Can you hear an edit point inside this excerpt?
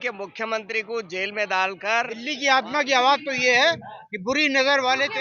yes; 1 cut; at 2.2 s

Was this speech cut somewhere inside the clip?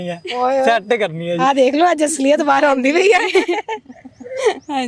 no; 0 cuts

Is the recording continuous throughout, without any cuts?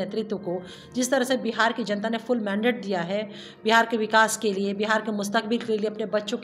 yes; 0 cuts

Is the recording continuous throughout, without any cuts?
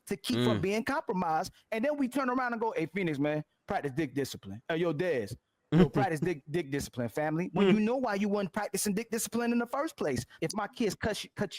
no; 1 cut; at 10.3 s

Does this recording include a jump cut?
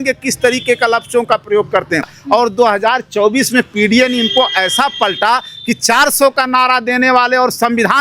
yes; 1 cut; at 2.1 s

